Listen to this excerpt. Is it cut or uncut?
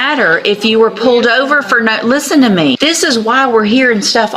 cut